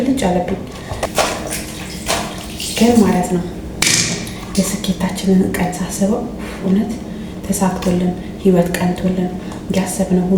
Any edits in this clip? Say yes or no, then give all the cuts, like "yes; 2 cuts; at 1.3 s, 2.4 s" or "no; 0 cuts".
yes; 1 cut; at 1.0 s